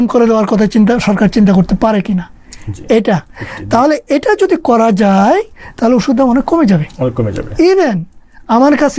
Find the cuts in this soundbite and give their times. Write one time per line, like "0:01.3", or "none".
none